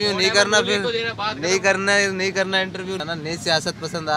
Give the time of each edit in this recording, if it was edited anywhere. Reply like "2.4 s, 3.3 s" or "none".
3.0 s

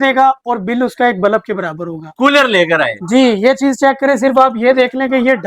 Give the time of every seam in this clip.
none

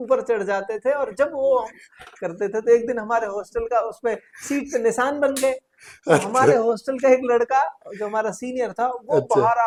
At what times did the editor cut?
none

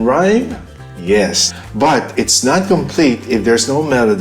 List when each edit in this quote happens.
1.4 s

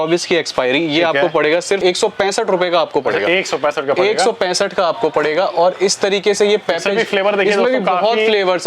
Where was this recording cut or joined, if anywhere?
none

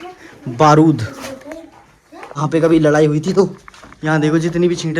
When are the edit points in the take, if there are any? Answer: 2.3 s

